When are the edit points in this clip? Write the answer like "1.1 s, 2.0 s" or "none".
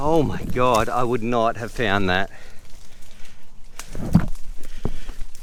none